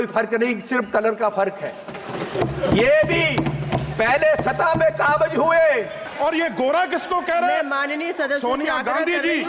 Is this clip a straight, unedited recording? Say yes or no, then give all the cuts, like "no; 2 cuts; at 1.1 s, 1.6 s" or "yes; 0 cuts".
no; 1 cut; at 6.0 s